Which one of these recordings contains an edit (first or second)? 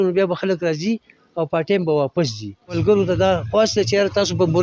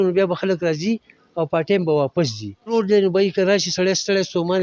first